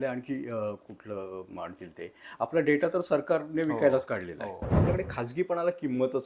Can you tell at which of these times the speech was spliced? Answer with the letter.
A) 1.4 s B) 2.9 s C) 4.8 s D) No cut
C